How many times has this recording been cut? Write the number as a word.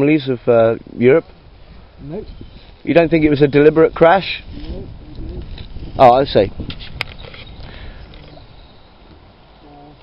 zero